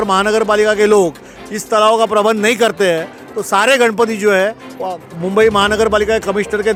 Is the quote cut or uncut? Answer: uncut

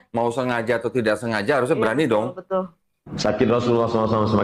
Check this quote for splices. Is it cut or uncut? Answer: cut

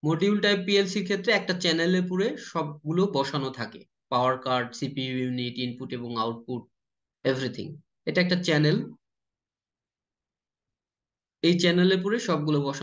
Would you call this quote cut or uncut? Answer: uncut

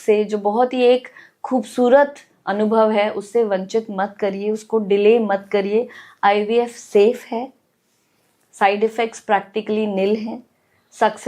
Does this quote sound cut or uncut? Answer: uncut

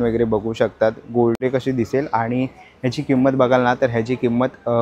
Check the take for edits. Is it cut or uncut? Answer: cut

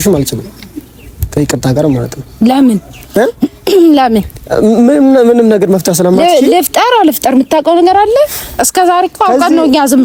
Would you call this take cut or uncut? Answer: uncut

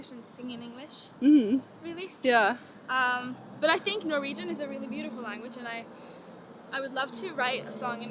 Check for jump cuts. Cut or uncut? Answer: uncut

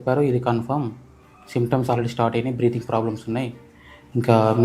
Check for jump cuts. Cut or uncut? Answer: uncut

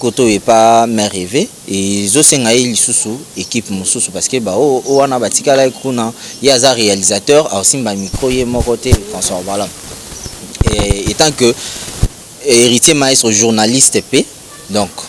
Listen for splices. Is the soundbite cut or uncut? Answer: uncut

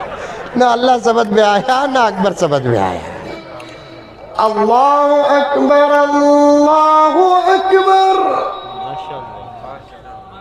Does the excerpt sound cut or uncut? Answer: cut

